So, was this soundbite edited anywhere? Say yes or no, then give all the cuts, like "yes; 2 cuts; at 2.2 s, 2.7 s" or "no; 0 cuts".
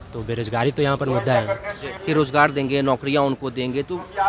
yes; 1 cut; at 1.9 s